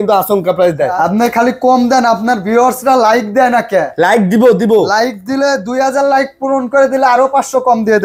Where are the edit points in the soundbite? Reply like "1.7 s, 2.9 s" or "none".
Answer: 0.9 s